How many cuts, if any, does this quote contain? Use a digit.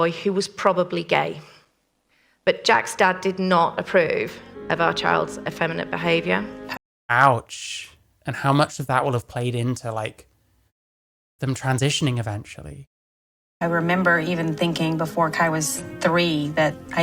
0